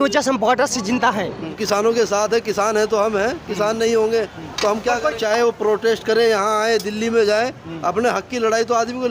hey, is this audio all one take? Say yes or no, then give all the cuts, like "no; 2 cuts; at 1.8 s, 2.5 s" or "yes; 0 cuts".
no; 2 cuts; at 1.5 s, 5.2 s